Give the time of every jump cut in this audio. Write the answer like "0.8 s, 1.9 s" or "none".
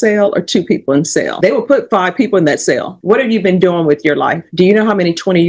1.3 s, 2.9 s, 4.4 s